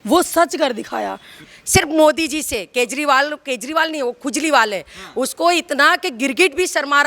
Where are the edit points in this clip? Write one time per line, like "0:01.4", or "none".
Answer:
0:01.3